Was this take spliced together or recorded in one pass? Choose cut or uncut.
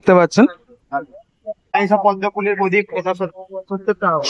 cut